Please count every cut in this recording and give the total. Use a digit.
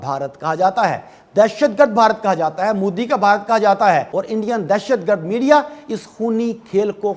1